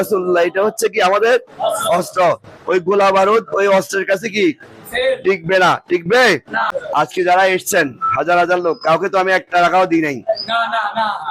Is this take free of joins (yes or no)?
no